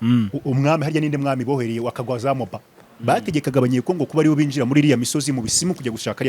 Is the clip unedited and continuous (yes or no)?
no